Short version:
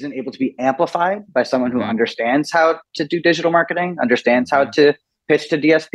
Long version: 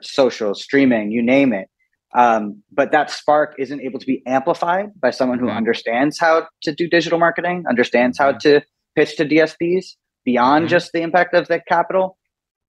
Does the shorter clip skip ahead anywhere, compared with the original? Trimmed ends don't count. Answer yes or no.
no